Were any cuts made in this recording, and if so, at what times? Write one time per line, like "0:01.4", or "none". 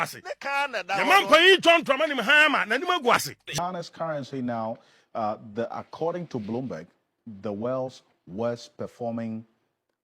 0:03.6